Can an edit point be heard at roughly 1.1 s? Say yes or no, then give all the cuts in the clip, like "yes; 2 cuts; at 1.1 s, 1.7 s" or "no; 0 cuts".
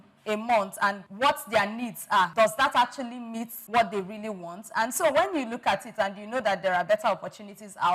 yes; 3 cuts; at 1.1 s, 2.3 s, 3.5 s